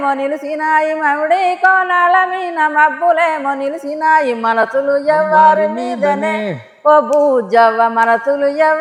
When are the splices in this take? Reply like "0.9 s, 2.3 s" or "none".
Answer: none